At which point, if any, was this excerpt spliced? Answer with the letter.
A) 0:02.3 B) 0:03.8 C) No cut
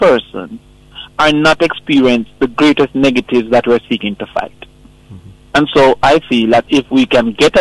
C